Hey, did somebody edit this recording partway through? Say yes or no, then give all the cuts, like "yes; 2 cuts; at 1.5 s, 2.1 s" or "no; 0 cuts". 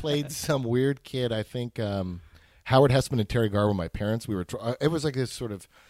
no; 0 cuts